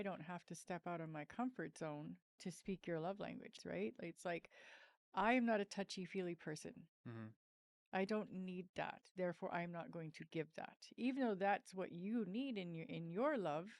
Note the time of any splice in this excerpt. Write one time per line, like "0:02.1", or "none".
0:02.3
0:03.5